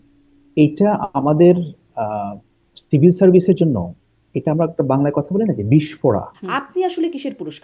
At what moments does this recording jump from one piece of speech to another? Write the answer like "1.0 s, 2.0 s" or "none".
6.4 s